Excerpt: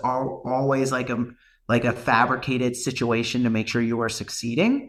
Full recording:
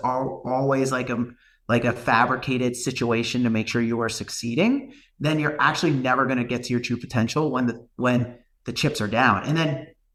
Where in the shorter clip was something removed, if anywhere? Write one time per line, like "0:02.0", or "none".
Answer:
none